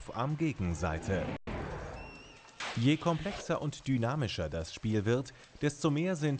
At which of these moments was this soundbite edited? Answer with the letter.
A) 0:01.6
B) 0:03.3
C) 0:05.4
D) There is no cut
A